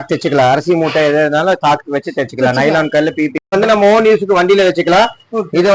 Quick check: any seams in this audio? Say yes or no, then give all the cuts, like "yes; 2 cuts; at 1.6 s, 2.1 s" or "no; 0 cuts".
yes; 1 cut; at 3.5 s